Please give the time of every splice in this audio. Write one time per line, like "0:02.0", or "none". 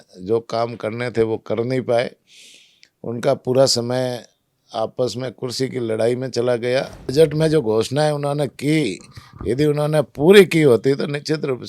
0:07.1